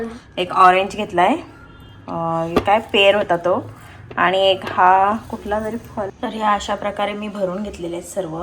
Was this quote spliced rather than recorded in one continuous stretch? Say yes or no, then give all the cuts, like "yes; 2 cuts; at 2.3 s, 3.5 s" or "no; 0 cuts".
yes; 1 cut; at 6.1 s